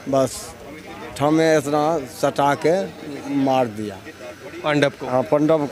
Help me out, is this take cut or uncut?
uncut